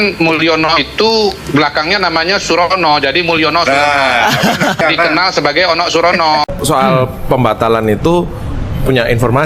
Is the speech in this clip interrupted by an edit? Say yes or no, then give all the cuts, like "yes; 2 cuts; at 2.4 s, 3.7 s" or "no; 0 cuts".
yes; 1 cut; at 6.6 s